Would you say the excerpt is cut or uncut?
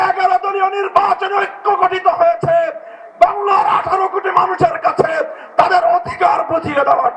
uncut